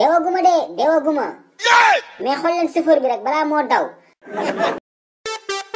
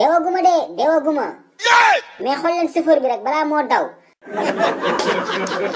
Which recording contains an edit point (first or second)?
first